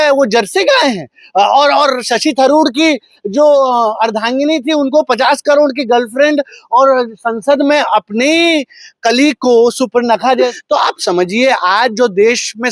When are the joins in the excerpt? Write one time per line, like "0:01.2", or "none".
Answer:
0:10.5